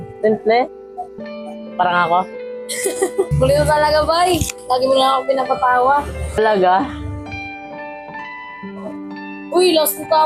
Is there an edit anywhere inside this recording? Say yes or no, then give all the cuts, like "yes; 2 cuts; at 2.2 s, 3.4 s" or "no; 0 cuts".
no; 0 cuts